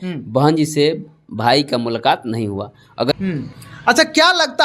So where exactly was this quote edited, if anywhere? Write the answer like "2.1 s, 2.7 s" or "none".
3.1 s